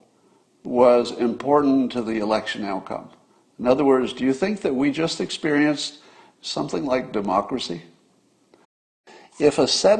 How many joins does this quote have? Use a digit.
1